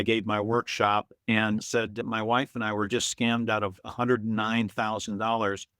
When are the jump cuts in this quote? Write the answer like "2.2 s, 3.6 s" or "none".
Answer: none